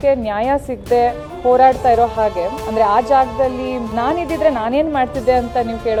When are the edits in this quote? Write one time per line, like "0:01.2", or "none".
none